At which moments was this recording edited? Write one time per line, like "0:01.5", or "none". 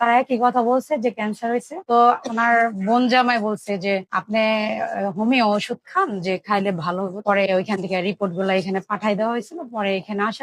0:01.7
0:07.2